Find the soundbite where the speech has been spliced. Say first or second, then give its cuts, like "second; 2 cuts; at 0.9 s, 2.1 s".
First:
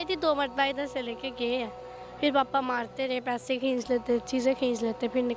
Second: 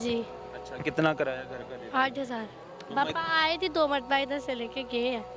second; 1 cut; at 2.6 s